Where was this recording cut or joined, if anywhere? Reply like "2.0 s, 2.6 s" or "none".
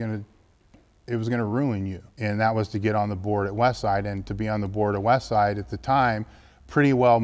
2.0 s